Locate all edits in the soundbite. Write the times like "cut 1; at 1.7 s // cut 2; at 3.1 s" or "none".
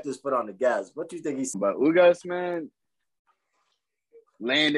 cut 1; at 1.5 s